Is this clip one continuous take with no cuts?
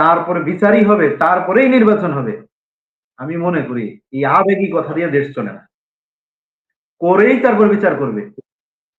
yes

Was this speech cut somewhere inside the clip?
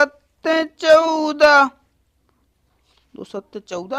no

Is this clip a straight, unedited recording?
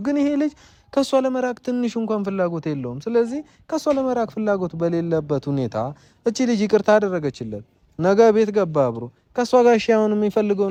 yes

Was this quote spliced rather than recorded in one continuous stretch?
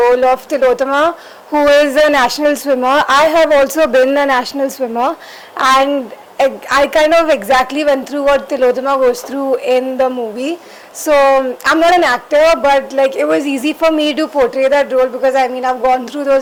no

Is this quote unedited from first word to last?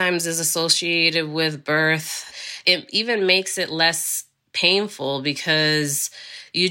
no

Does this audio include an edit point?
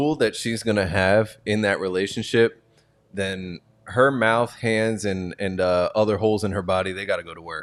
no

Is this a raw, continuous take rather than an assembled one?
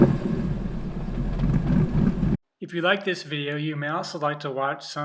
no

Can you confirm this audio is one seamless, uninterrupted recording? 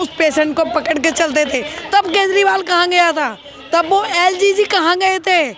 yes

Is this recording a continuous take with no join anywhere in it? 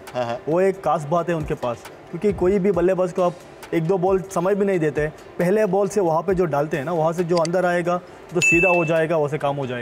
yes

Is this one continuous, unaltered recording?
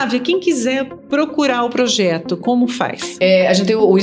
yes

